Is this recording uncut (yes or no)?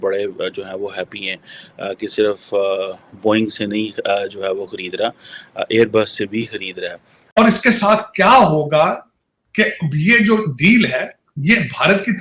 no